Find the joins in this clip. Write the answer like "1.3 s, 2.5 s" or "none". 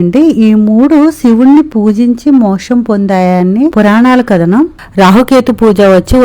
3.7 s, 4.8 s